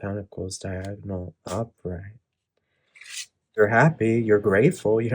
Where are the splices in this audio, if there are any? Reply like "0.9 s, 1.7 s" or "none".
3.6 s